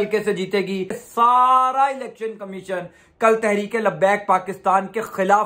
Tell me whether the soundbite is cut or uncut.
cut